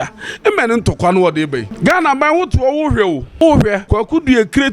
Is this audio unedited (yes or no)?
no